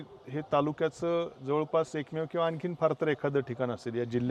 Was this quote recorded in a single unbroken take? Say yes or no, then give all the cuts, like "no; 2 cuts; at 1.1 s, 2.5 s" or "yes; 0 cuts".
yes; 0 cuts